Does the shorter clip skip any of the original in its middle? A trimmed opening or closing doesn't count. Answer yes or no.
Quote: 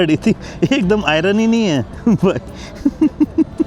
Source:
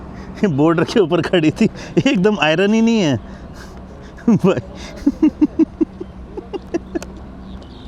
yes